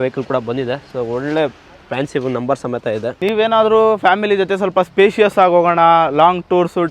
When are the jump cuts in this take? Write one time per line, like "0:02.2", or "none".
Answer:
0:03.2